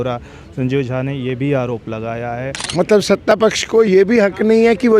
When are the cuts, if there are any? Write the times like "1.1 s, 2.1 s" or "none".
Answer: 2.6 s